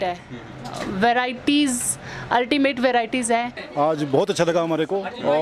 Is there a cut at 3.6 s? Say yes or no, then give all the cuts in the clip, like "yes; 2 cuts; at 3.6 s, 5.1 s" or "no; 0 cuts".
yes; 1 cut; at 3.6 s